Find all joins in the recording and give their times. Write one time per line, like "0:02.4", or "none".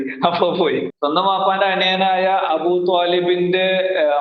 0:00.9